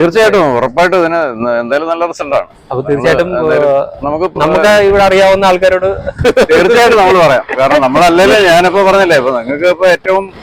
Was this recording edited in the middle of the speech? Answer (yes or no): no